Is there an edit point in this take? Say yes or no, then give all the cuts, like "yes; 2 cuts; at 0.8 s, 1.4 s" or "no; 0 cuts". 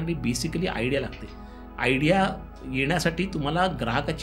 no; 0 cuts